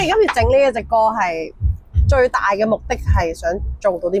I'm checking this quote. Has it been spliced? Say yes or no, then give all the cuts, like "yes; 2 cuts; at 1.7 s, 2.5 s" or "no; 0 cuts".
no; 0 cuts